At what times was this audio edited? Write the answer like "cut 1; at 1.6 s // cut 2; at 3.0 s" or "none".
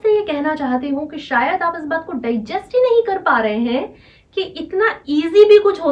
none

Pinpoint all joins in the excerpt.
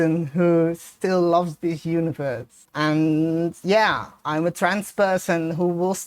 none

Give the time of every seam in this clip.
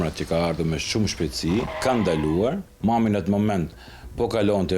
cut 1; at 1.7 s // cut 2; at 2.7 s

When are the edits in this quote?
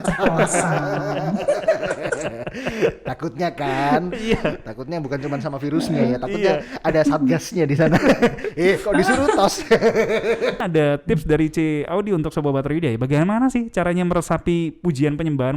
cut 1; at 10.6 s

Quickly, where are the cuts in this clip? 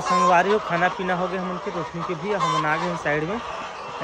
none

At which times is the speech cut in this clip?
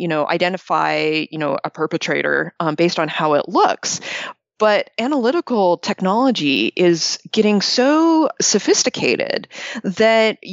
none

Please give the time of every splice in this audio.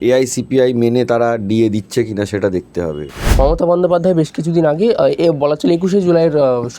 cut 1; at 3.2 s

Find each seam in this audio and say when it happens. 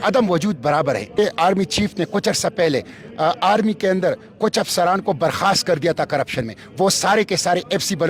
cut 1; at 1.1 s

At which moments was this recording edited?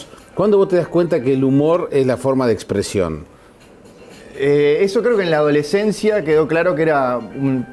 cut 1; at 2.4 s

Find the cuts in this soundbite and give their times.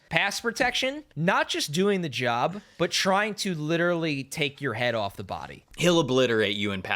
cut 1; at 1.1 s // cut 2; at 2.6 s // cut 3; at 5.8 s

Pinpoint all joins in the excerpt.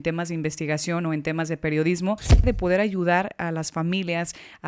cut 1; at 2.4 s

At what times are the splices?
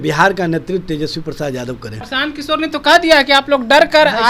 cut 1; at 2.0 s

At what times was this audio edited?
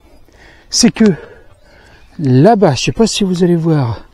none

